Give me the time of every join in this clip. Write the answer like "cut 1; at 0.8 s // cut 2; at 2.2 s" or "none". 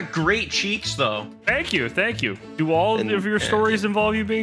cut 1; at 2.4 s